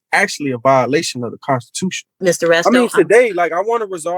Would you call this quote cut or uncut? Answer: cut